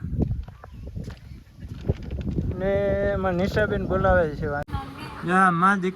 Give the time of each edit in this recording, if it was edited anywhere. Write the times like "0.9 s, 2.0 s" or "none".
4.8 s

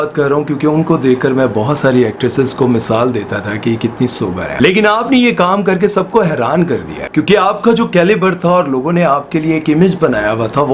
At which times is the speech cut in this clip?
4.5 s

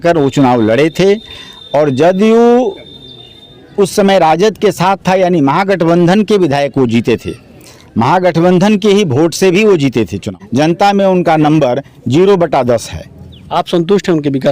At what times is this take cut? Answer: 10.4 s

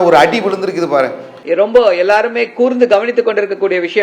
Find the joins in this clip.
1.3 s

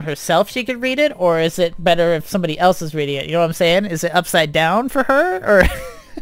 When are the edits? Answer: none

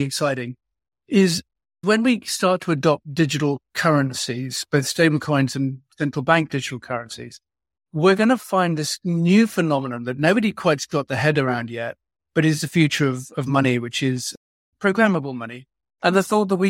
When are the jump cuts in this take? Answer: 1.8 s

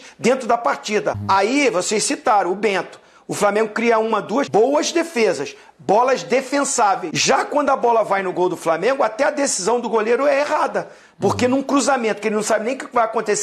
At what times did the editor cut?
1.2 s, 4.5 s, 7.1 s

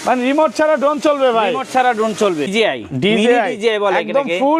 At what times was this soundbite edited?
2.5 s

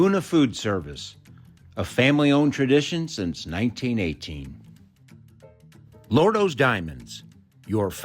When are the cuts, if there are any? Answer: 4.5 s, 6.1 s

